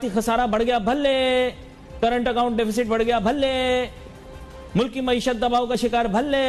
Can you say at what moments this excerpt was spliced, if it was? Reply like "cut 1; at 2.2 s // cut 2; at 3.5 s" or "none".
none